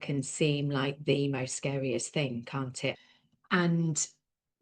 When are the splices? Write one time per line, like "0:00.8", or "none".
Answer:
0:03.0